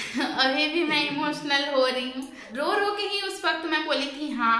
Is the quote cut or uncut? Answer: cut